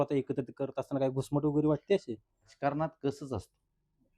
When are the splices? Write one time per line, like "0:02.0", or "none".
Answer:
0:02.5